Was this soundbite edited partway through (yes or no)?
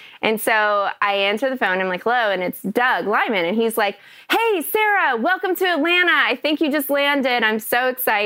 no